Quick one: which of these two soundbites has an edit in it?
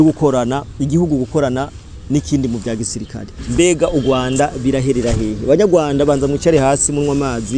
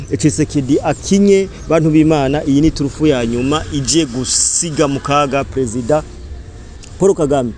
first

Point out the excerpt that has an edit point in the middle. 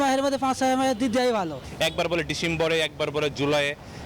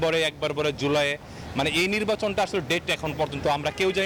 first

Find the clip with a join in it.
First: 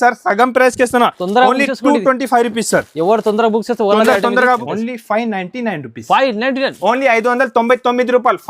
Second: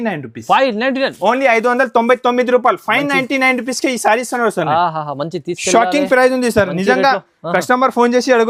first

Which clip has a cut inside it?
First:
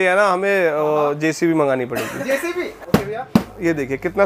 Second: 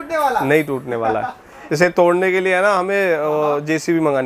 first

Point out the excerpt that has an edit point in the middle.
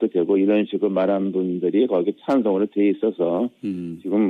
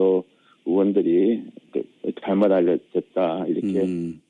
first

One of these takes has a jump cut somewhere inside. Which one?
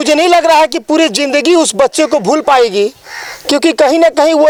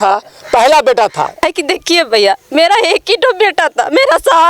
second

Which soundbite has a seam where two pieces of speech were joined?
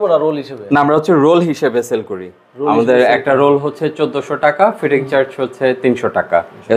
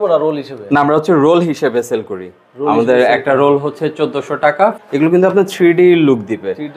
second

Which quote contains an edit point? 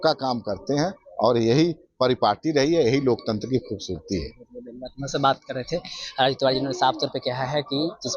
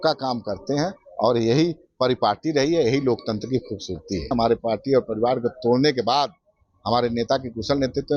second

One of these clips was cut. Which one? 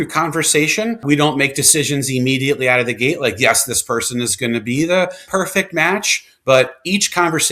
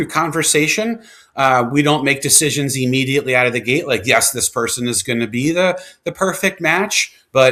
first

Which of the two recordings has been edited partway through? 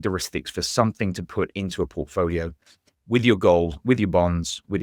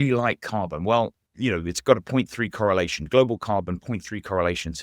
second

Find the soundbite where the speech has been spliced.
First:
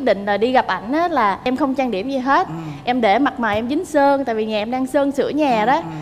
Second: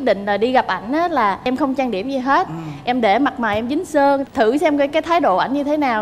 second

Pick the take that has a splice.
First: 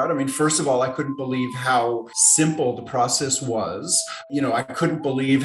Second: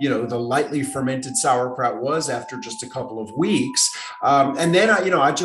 first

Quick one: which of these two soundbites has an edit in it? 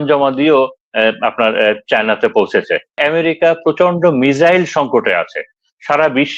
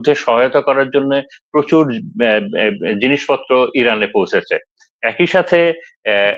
first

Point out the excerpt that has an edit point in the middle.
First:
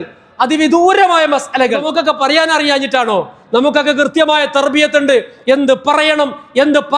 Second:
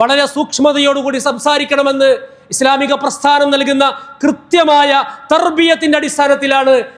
first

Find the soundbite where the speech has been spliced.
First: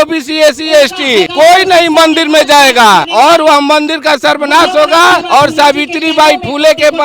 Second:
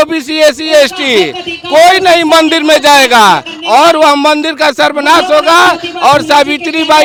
first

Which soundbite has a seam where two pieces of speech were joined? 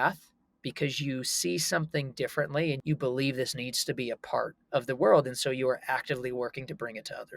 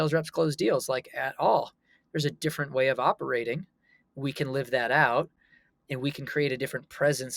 first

